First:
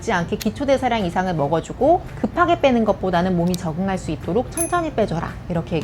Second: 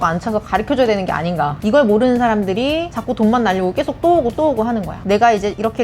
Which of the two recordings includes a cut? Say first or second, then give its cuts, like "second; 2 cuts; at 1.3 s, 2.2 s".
second; 3 cuts; at 1.5 s, 2.9 s, 4.9 s